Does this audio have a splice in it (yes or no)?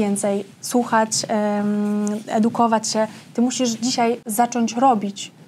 no